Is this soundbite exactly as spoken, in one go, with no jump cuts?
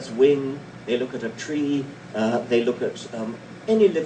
no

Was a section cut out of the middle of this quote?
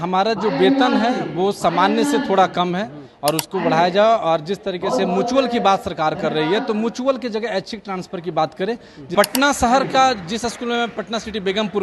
yes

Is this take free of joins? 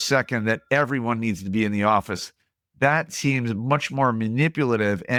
yes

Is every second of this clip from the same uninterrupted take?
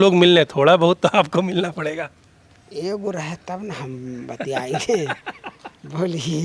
yes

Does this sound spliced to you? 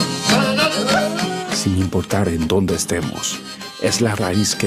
no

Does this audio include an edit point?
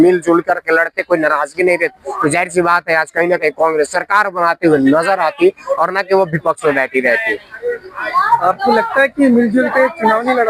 no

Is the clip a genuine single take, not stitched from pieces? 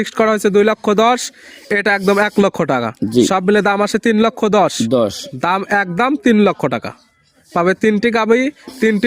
yes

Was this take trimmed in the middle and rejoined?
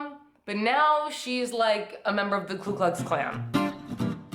yes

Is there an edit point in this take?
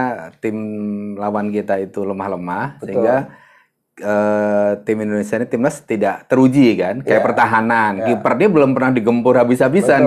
no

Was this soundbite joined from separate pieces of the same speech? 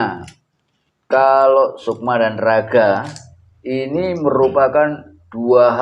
yes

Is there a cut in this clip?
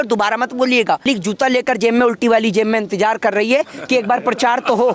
yes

